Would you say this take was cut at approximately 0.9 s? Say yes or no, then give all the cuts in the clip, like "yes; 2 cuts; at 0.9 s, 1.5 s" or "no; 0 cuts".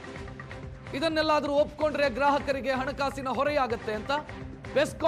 yes; 1 cut; at 0.9 s